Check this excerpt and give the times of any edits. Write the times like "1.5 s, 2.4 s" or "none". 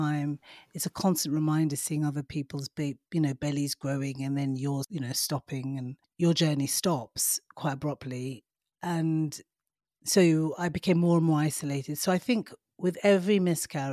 4.9 s, 6.0 s